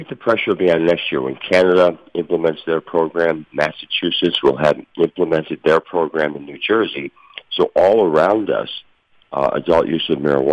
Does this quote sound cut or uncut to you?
uncut